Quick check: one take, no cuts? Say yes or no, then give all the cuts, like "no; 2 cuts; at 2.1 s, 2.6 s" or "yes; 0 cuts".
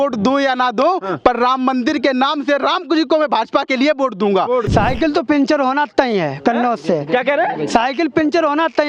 no; 1 cut; at 4.7 s